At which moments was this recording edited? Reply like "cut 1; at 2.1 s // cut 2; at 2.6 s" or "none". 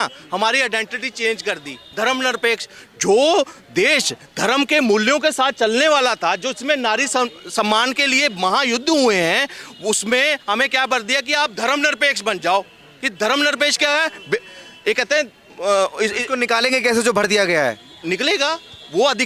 none